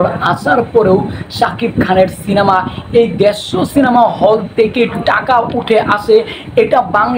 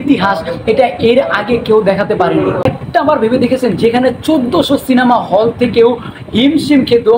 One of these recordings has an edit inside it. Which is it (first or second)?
second